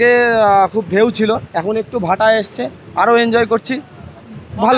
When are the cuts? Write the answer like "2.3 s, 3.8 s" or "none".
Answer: none

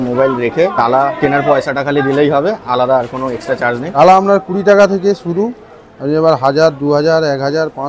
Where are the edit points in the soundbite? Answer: 1.1 s, 4.0 s

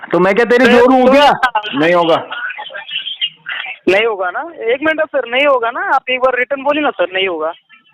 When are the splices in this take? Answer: 1.6 s

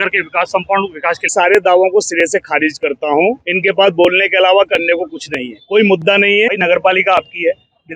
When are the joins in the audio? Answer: 1.3 s, 6.5 s

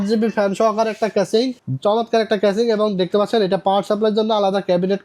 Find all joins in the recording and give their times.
none

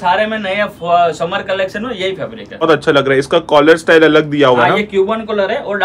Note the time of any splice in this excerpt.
2.6 s

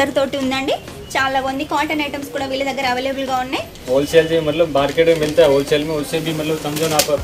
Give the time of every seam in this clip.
3.7 s

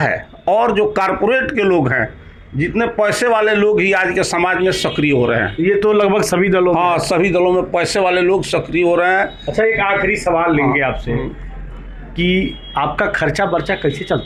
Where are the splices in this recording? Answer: none

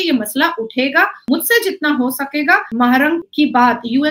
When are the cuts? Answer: 1.2 s, 2.9 s

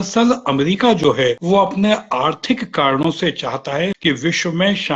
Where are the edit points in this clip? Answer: 1.4 s, 4.0 s

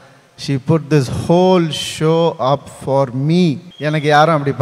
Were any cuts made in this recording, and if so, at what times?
3.7 s

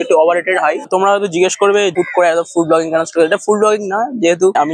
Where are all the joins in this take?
0.8 s, 1.9 s

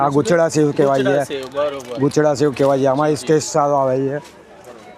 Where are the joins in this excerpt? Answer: none

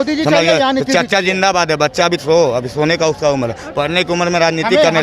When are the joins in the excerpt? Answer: none

